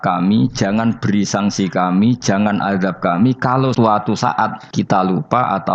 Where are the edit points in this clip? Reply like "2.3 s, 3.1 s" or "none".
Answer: 3.7 s, 4.6 s